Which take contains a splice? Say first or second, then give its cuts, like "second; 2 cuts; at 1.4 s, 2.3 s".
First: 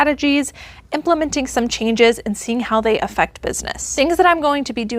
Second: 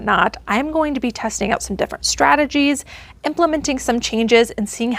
first; 1 cut; at 3.8 s